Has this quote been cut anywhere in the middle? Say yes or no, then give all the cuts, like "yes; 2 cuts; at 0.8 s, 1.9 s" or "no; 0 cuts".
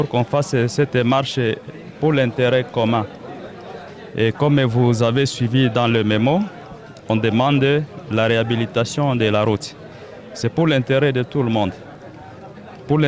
no; 0 cuts